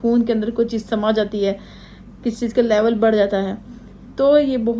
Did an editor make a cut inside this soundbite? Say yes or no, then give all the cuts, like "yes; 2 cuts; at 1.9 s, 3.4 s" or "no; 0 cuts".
no; 0 cuts